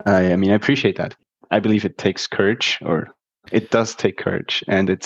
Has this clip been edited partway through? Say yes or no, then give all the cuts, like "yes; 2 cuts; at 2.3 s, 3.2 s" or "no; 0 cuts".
yes; 1 cut; at 1.3 s